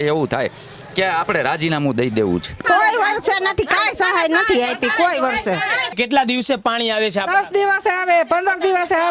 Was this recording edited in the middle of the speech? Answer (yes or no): yes